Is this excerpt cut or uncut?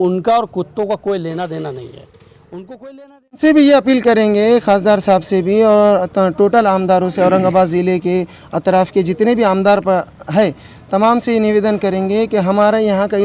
cut